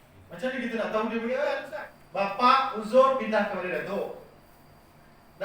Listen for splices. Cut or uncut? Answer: cut